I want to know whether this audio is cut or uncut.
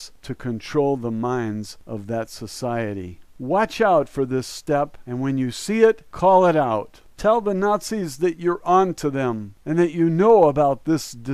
uncut